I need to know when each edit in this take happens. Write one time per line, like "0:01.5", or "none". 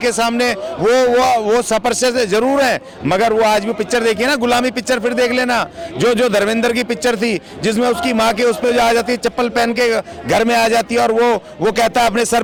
none